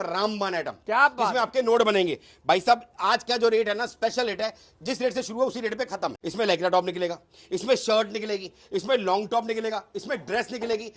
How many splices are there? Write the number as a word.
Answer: one